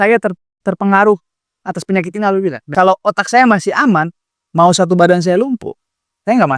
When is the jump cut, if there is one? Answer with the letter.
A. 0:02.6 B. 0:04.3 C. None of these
A